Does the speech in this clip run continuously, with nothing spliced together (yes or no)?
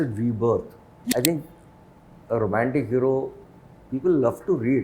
no